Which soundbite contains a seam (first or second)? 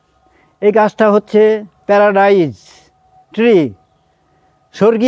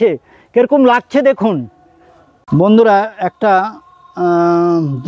second